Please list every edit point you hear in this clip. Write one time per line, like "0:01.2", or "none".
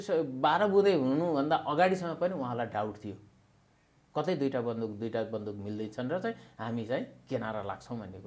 none